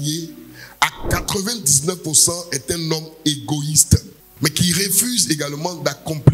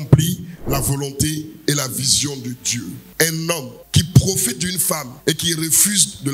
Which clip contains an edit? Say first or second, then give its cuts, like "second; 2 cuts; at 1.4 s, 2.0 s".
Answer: second; 1 cut; at 3.0 s